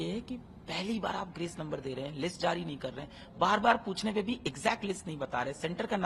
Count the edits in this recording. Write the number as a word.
zero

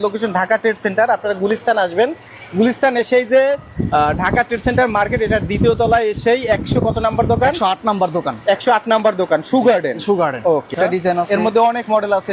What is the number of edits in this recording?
one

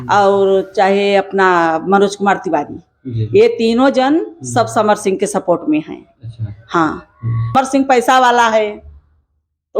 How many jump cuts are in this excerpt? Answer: one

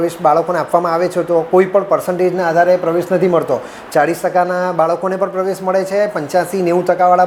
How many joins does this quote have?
zero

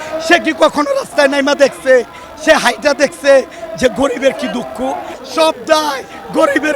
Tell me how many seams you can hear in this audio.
one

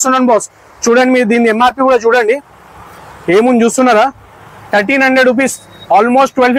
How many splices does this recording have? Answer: zero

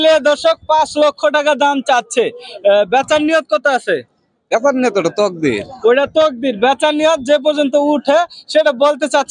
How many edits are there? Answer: zero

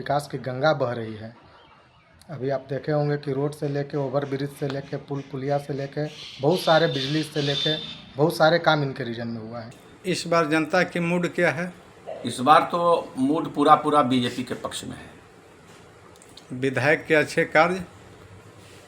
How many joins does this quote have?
zero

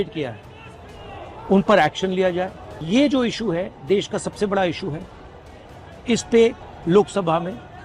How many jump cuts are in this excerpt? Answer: two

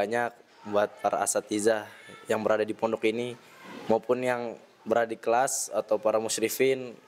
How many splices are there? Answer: zero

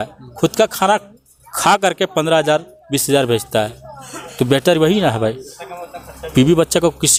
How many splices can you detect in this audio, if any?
zero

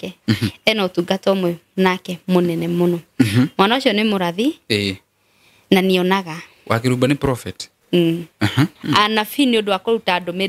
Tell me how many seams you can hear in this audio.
one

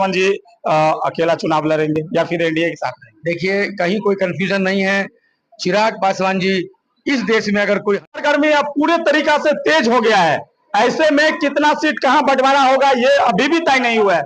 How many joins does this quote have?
one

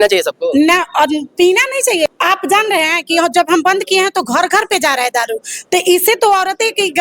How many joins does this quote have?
one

